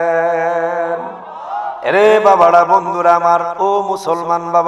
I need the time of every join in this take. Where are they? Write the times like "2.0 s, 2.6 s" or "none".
1.6 s